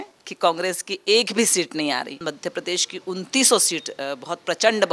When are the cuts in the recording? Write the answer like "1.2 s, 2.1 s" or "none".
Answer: 2.2 s